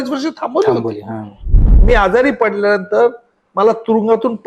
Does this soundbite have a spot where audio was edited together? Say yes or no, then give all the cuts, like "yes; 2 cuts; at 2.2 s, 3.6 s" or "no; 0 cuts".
yes; 1 cut; at 1.8 s